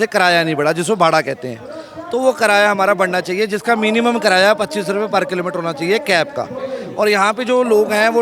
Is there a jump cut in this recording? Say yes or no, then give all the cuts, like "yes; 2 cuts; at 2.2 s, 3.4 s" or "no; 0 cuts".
no; 0 cuts